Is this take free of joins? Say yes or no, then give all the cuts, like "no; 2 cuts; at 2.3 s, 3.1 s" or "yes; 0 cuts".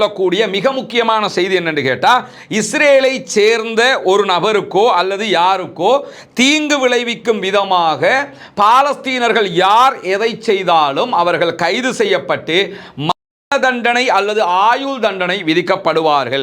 yes; 0 cuts